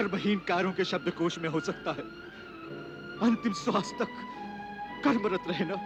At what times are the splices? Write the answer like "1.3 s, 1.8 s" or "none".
none